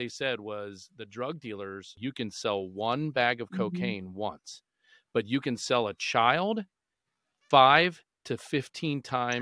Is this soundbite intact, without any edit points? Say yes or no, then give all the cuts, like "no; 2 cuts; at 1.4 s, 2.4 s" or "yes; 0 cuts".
no; 1 cut; at 1.9 s